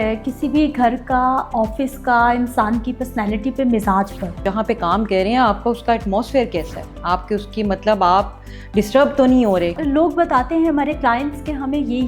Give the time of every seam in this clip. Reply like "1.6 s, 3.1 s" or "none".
4.4 s, 9.8 s

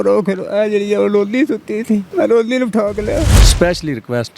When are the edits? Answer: 2.1 s, 3.4 s

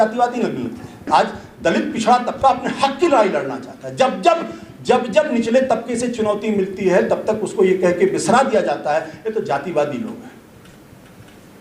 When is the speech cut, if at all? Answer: 1.0 s

